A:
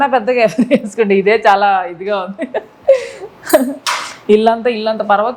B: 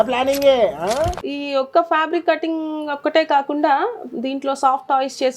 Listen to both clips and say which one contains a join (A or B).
B